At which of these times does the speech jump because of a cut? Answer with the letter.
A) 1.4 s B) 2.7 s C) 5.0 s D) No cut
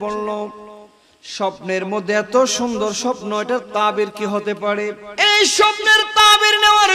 C